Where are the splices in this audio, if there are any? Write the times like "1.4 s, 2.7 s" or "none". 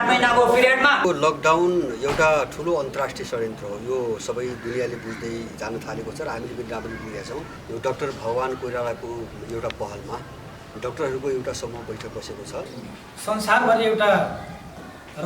1.0 s, 7.6 s, 12.8 s